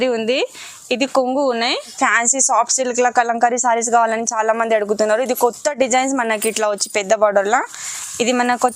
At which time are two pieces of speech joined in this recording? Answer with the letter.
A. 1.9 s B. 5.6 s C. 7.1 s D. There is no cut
A